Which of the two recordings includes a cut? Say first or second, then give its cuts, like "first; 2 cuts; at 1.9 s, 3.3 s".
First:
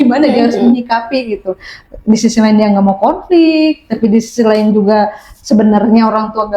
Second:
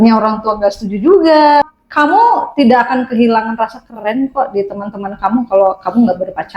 second; 1 cut; at 1.7 s